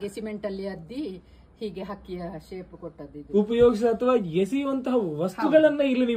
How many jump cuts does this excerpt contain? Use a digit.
1